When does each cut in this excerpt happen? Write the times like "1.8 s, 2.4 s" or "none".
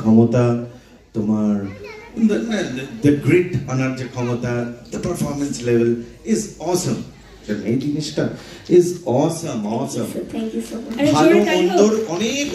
none